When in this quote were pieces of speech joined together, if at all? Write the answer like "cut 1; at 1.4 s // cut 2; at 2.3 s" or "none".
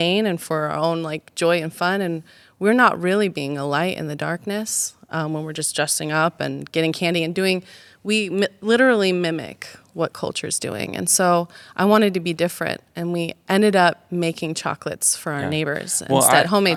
none